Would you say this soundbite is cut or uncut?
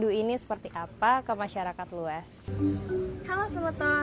cut